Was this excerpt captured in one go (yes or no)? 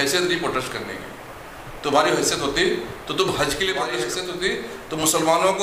no